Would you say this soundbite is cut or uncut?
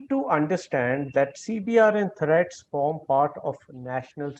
uncut